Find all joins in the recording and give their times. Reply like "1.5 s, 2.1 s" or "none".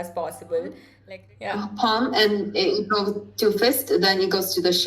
0.9 s